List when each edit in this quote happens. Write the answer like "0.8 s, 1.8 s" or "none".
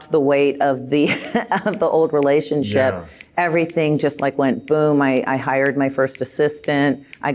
none